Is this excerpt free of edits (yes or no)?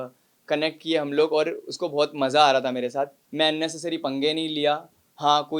no